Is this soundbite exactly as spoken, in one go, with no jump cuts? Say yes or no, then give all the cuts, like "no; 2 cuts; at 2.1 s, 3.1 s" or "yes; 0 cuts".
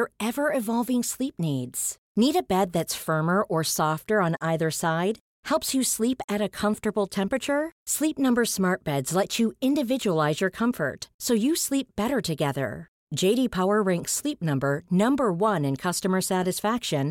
yes; 0 cuts